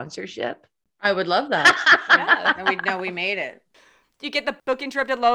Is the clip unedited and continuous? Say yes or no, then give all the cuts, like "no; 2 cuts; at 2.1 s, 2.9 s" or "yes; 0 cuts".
yes; 0 cuts